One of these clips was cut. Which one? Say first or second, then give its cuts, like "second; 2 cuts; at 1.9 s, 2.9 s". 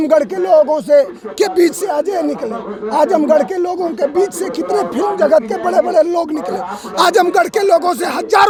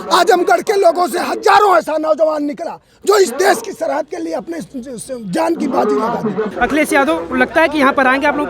second; 1 cut; at 6.5 s